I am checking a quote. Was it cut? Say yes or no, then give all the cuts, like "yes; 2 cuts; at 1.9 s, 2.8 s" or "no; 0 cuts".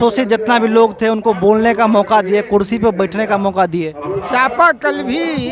yes; 1 cut; at 4.2 s